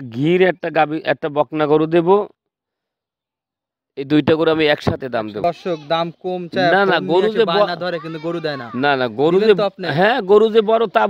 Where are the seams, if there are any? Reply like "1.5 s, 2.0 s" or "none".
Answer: 5.4 s